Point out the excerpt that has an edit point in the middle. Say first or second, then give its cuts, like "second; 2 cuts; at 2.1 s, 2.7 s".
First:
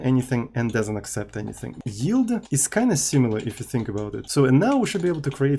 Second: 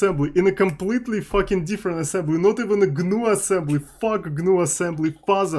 first; 3 cuts; at 1.7 s, 2.5 s, 4.2 s